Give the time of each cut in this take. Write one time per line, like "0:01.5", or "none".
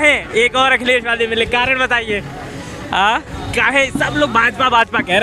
none